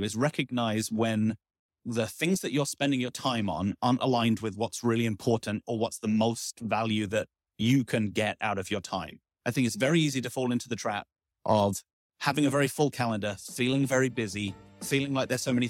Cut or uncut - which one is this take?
uncut